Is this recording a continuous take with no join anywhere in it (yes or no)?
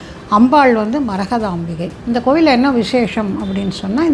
yes